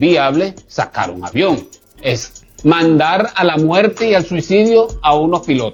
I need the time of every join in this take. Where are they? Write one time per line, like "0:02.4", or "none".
none